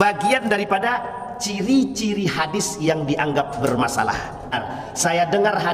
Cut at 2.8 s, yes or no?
no